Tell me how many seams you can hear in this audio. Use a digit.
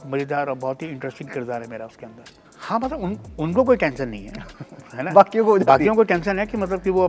1